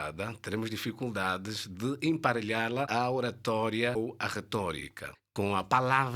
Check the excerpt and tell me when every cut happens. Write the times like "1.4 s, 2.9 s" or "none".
2.9 s, 3.9 s, 5.0 s

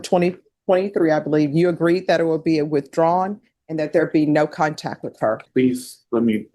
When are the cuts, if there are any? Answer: 5.4 s

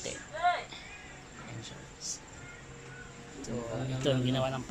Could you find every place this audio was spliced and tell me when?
3.4 s

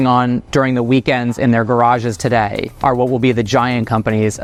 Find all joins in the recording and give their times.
none

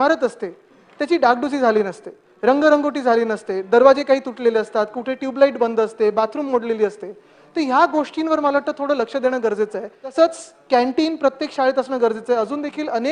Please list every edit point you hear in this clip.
10.1 s

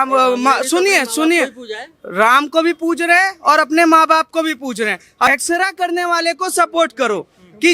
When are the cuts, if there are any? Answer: 5.3 s

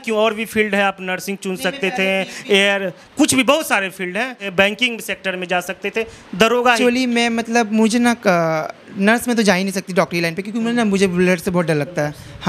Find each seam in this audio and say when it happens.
4.4 s, 6.8 s

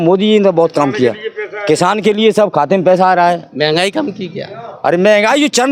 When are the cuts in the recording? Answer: none

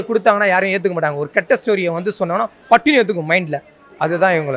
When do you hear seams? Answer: none

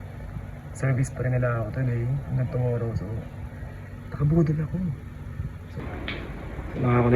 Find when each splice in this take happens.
5.6 s

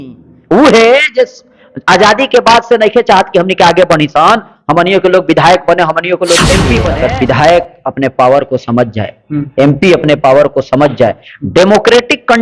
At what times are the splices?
6.9 s

